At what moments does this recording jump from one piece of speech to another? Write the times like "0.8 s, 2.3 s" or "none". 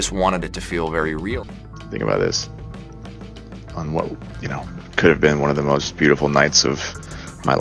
1.5 s